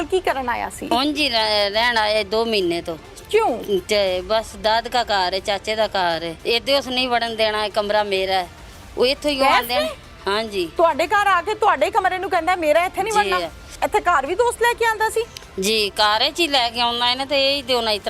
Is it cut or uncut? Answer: cut